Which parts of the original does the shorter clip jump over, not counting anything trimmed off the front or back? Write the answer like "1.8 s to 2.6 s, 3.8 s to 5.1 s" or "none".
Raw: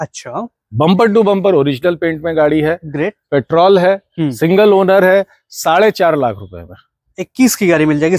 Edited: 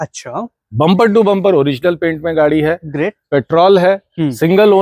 none